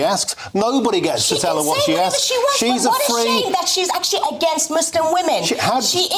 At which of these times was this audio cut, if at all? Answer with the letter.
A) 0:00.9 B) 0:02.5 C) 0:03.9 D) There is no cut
D